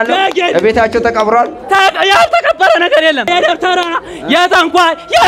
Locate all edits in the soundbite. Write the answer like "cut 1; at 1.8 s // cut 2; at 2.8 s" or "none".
cut 1; at 3.3 s